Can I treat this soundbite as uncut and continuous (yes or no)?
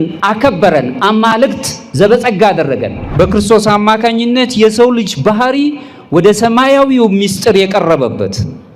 no